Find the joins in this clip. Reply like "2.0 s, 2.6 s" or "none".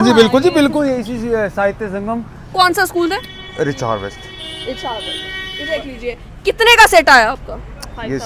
none